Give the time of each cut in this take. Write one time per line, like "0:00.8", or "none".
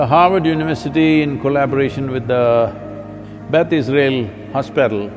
none